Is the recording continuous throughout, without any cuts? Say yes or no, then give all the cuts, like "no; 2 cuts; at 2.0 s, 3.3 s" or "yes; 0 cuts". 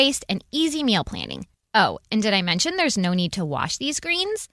yes; 0 cuts